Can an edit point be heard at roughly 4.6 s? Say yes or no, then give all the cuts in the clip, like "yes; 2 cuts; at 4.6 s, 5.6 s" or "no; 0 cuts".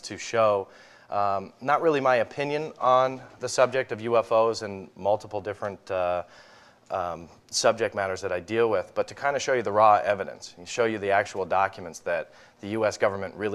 yes; 1 cut; at 4.6 s